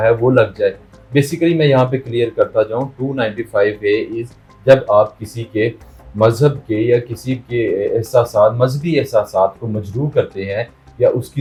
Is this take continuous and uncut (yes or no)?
yes